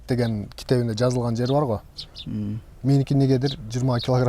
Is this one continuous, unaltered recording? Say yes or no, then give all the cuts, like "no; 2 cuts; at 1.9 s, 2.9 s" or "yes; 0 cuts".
yes; 0 cuts